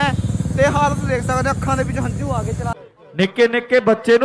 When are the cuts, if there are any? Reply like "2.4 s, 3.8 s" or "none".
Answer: 2.7 s

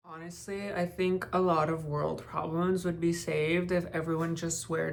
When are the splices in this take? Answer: none

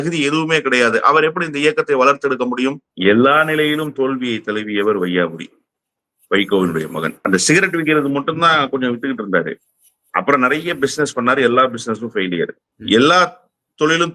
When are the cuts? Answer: 2.9 s, 7.1 s, 12.7 s

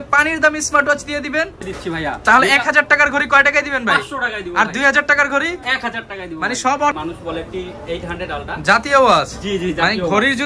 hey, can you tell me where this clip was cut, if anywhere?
1.6 s, 6.9 s

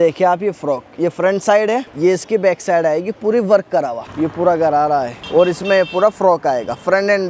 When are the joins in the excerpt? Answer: 1.9 s, 4.0 s, 5.2 s

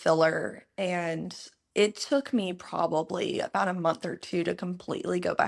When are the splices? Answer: none

